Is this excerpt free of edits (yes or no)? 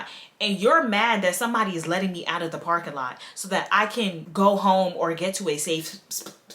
yes